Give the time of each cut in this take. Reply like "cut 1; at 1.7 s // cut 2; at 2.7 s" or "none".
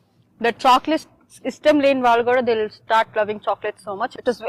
none